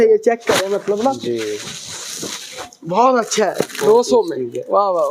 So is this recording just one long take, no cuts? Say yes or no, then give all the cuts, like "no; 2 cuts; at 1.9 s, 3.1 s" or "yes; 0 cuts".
yes; 0 cuts